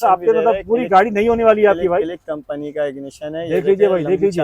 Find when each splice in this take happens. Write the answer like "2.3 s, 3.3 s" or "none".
none